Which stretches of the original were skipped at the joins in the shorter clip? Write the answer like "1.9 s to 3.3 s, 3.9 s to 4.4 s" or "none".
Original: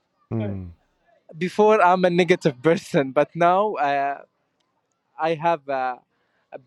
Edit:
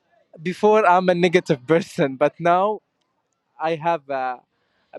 3.7 s to 4.4 s